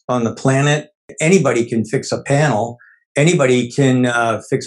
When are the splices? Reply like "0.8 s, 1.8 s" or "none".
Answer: 1.0 s